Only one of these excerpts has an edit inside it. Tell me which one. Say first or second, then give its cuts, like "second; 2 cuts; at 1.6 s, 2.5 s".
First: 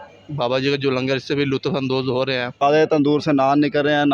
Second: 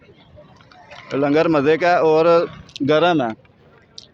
first; 1 cut; at 2.6 s